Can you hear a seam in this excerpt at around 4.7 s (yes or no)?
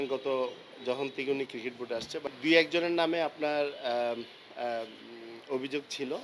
no